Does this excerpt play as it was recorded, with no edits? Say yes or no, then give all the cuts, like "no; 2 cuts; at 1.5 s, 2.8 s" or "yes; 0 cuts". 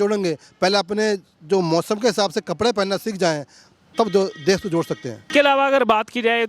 yes; 0 cuts